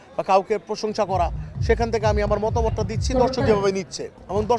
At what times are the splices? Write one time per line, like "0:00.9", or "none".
none